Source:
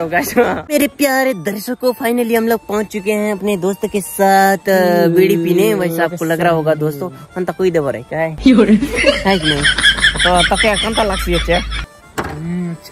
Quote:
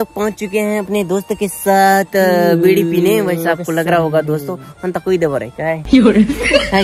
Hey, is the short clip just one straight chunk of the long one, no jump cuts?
yes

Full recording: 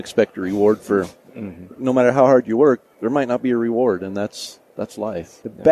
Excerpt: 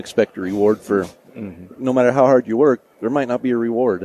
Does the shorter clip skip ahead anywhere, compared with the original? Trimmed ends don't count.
no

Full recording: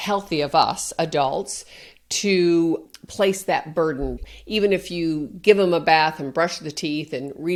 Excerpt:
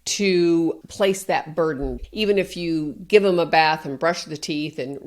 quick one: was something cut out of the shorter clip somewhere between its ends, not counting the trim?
yes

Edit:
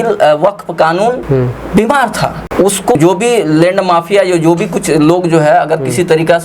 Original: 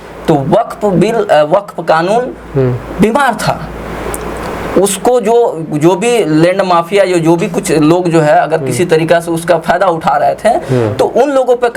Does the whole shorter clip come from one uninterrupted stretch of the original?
no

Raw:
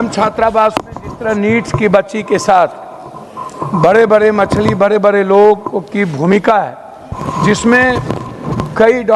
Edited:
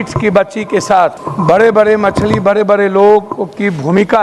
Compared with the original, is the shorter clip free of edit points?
no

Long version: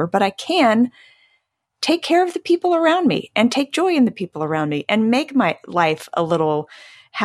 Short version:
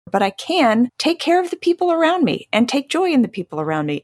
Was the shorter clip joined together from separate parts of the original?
yes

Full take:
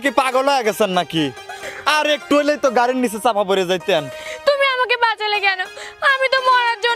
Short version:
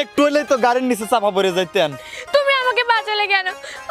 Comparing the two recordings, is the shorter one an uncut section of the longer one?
yes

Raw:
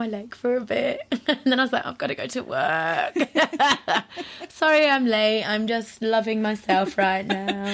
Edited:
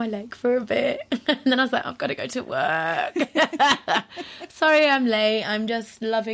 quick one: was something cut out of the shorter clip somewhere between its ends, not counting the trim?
no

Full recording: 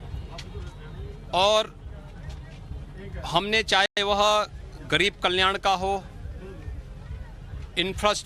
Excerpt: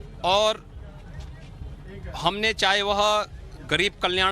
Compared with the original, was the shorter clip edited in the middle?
yes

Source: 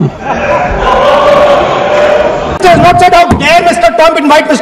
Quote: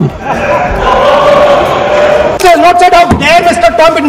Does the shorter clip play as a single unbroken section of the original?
no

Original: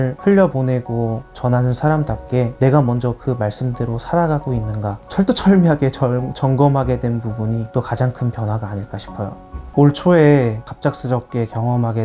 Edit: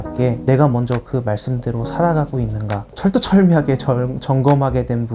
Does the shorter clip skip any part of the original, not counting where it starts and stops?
no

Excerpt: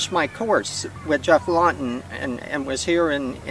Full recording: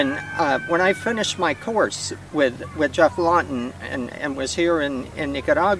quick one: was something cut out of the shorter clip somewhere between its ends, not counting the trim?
yes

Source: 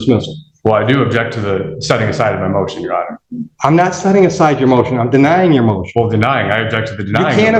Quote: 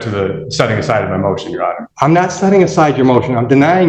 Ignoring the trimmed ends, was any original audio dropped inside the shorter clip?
yes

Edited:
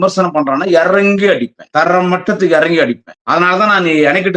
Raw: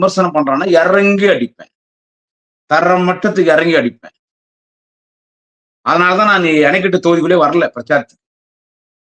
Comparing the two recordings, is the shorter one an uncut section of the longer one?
no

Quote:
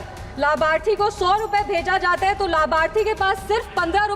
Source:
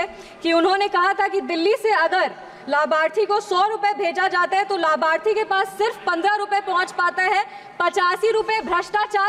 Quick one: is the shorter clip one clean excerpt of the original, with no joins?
yes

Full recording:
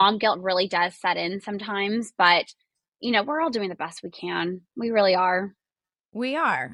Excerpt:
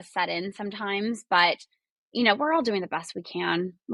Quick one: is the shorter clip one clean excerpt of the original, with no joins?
yes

